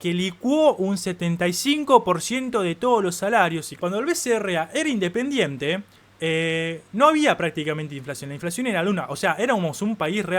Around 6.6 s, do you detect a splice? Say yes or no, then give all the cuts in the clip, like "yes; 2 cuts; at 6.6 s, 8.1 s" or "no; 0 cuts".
no; 1 cut; at 3.7 s